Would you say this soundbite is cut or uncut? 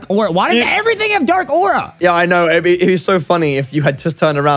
uncut